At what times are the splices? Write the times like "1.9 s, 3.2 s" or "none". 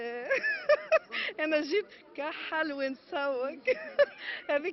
none